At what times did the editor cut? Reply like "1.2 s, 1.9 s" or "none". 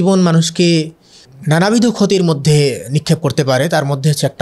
none